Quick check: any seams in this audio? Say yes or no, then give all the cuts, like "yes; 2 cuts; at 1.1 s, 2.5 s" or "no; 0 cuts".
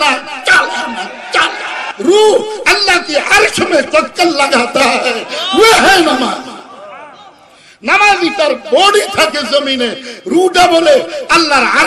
yes; 1 cut; at 1.8 s